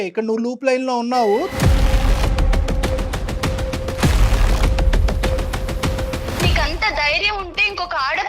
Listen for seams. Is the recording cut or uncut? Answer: cut